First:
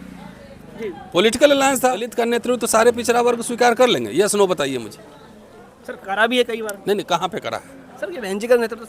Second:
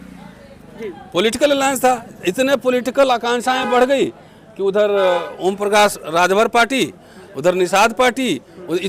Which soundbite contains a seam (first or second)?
first